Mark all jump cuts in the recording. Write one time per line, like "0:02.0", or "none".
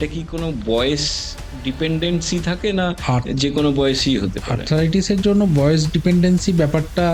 none